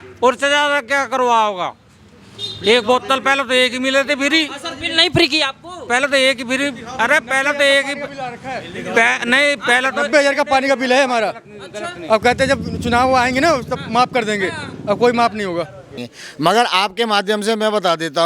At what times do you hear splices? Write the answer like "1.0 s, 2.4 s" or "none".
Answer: 16.0 s